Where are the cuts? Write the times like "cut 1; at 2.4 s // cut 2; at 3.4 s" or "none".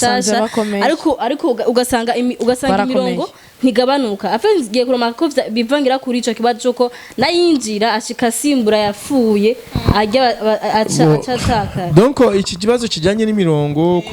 none